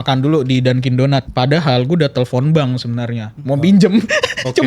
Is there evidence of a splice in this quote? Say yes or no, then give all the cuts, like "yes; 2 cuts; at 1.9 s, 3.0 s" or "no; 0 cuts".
yes; 1 cut; at 1.3 s